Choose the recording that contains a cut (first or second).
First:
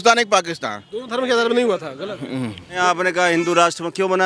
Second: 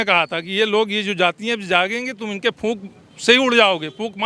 first